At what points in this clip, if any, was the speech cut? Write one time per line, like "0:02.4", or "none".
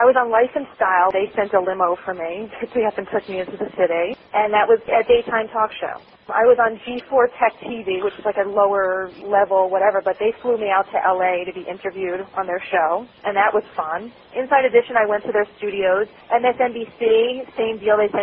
0:01.1
0:06.1